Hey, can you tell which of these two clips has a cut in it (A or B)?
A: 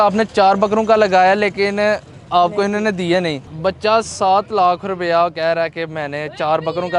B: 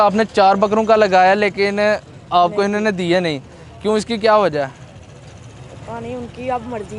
A